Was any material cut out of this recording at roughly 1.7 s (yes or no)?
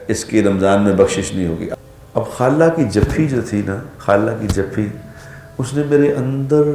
yes